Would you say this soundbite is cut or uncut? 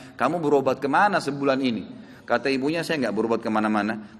uncut